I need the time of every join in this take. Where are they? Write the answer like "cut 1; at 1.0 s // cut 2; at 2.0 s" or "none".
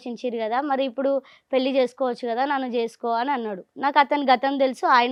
none

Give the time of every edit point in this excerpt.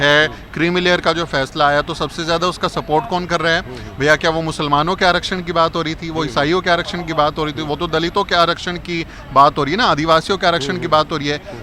none

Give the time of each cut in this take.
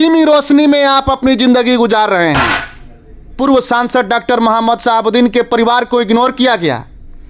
cut 1; at 3.3 s

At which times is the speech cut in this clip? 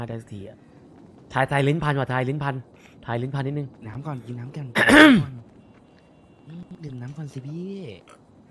none

